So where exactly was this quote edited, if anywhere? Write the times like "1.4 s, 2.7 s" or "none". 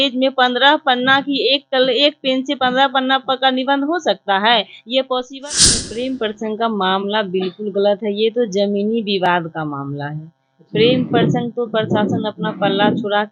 5.4 s